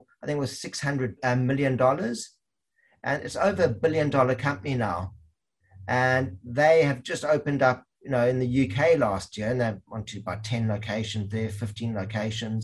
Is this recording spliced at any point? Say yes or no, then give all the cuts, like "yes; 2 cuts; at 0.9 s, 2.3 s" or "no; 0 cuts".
yes; 1 cut; at 1.2 s